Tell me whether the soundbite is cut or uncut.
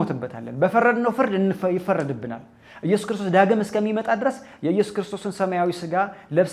uncut